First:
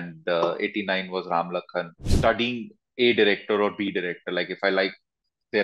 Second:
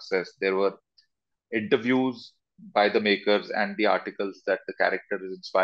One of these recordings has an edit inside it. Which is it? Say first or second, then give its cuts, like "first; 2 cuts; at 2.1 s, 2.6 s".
first; 1 cut; at 2.0 s